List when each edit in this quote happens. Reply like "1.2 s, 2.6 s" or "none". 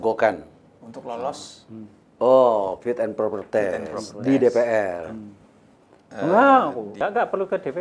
6.9 s